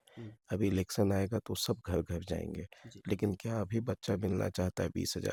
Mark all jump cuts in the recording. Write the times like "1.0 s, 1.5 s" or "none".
none